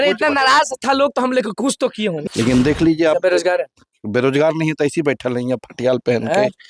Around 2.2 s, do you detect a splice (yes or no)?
yes